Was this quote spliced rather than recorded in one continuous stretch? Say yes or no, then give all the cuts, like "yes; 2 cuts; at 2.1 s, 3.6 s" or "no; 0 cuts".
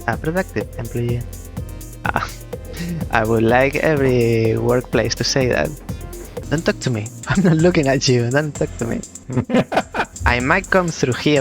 yes; 4 cuts; at 6.4 s, 7.2 s, 9.1 s, 10.1 s